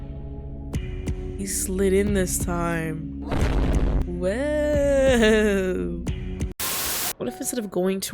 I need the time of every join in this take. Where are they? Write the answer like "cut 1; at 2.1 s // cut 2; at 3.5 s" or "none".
cut 1; at 6.6 s